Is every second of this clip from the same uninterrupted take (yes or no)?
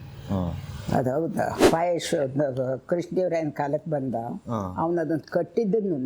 no